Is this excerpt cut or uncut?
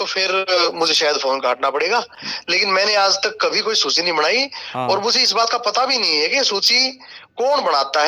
uncut